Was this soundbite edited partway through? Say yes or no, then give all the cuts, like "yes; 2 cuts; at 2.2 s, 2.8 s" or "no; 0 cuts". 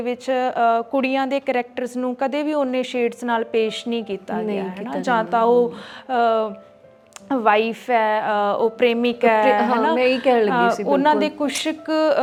no; 0 cuts